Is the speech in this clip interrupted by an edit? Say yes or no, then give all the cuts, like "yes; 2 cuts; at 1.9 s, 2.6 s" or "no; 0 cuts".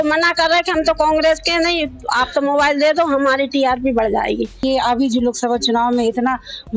yes; 1 cut; at 4.6 s